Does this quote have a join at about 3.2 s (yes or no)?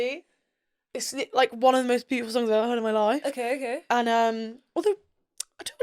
no